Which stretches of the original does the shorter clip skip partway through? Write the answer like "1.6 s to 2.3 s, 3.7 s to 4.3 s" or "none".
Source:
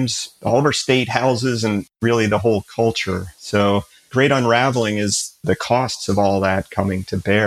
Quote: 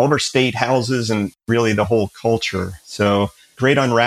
none